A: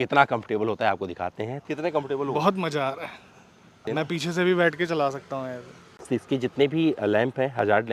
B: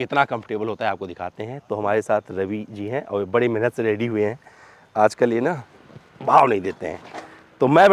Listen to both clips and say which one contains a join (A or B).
A